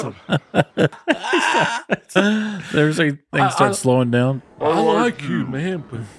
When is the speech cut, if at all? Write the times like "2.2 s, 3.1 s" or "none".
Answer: 1.0 s